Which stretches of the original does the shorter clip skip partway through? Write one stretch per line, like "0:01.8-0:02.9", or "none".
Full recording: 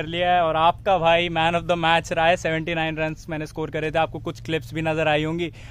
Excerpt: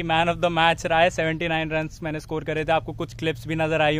none